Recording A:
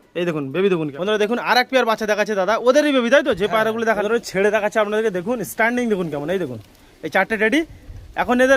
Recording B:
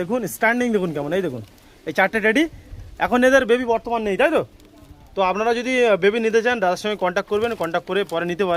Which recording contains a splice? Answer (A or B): A